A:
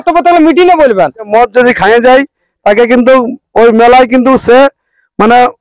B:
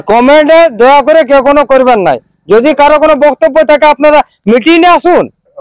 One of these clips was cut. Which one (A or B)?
A